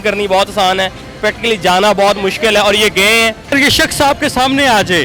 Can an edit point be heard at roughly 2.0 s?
no; 1 cut; at 3.5 s

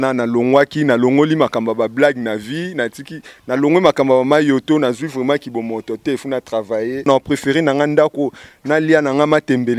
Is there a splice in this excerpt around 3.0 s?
no; 1 cut; at 7.1 s

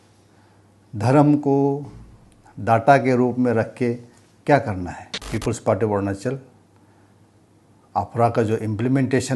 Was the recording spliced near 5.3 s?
yes; 1 cut; at 5.3 s

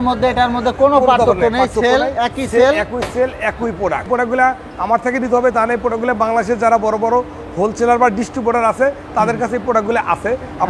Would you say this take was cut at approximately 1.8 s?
no; 1 cut; at 4.1 s

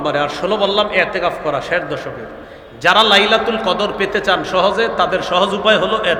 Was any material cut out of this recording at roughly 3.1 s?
no; 0 cuts

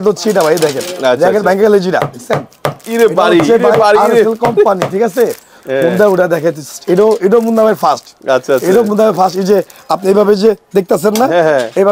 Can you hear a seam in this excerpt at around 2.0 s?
no; 1 cut; at 5.5 s

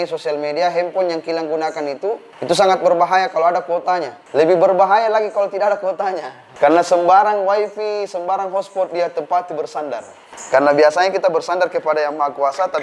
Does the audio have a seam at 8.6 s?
no; 4 cuts; at 2.3 s, 4.2 s, 6.4 s, 10.3 s

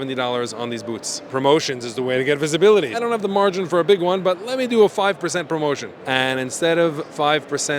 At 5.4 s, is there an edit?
no; 2 cuts; at 1.2 s, 2.9 s

